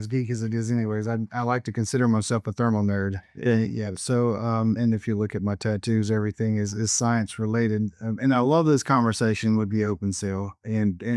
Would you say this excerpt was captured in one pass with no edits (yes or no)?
yes